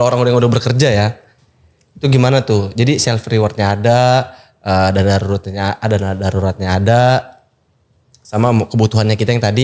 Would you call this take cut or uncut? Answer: uncut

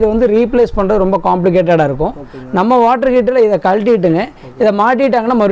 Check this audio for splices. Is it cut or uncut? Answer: uncut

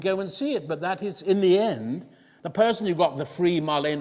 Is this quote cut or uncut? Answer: uncut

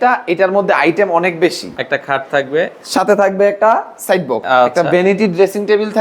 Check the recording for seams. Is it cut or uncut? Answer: cut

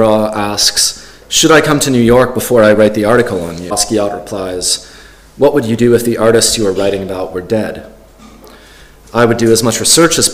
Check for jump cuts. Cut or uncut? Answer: cut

